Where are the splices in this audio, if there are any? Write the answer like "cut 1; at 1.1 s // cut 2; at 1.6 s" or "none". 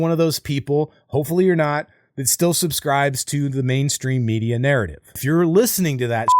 cut 1; at 5.0 s